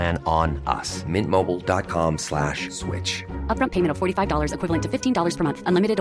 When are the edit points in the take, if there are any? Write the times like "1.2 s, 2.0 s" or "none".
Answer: none